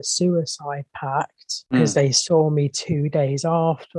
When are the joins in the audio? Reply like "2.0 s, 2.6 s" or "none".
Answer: 1.7 s